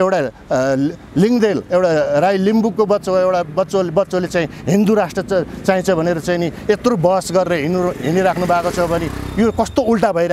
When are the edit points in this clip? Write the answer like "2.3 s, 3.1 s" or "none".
none